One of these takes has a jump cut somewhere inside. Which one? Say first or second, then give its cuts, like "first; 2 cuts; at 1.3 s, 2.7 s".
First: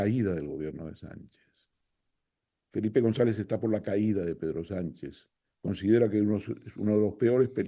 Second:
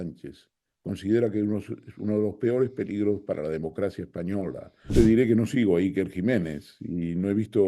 second; 1 cut; at 4.9 s